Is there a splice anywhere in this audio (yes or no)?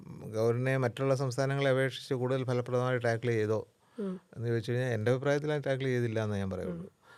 no